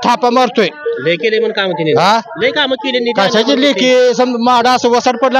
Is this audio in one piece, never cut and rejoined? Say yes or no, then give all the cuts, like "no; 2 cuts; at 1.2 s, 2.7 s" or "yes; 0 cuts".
yes; 0 cuts